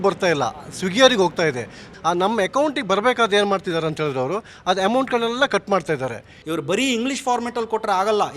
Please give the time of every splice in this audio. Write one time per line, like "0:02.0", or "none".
0:01.8
0:06.3

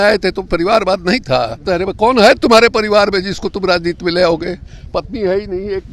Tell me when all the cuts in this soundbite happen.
0:01.6

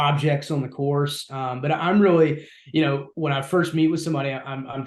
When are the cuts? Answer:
none

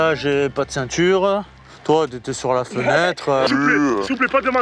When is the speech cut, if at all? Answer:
0:03.5

